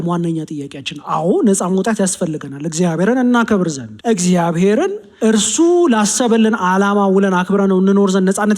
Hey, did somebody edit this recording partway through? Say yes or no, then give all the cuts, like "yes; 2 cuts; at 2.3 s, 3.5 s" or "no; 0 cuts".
yes; 2 cuts; at 3.9 s, 5.0 s